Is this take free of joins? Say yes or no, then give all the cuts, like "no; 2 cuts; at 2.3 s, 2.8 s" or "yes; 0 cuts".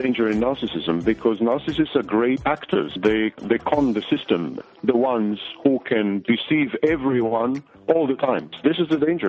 no; 2 cuts; at 3.3 s, 4.5 s